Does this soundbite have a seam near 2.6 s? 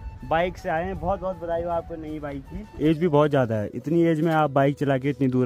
yes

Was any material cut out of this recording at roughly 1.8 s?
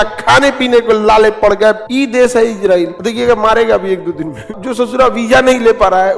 yes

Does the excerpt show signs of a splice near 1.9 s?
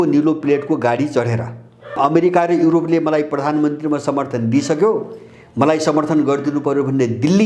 yes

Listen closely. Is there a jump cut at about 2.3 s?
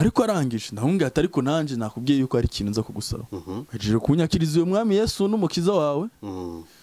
no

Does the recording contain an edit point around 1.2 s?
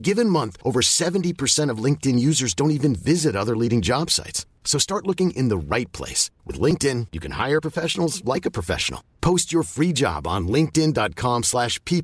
no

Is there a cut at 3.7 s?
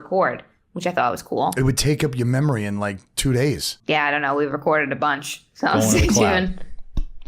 yes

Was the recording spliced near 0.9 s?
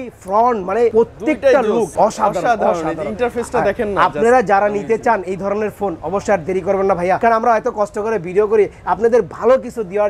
yes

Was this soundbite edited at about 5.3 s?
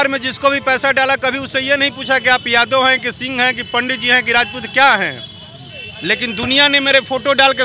no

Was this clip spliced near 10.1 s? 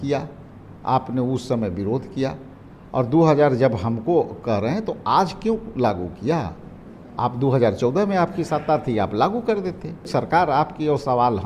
yes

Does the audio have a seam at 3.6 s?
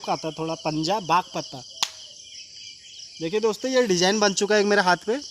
no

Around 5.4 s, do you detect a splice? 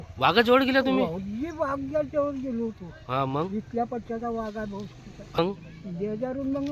yes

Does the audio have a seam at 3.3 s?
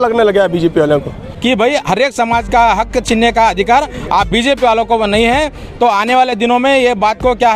no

